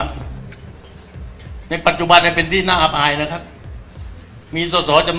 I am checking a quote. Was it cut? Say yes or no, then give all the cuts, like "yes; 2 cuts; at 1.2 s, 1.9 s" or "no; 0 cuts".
no; 0 cuts